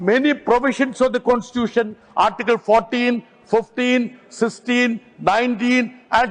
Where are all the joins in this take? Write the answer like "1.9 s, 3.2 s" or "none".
none